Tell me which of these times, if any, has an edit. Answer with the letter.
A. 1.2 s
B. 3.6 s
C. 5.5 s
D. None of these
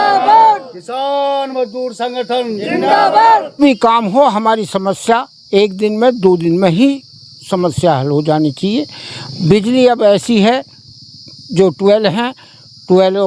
B